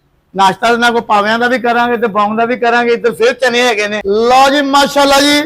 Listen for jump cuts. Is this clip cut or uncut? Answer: uncut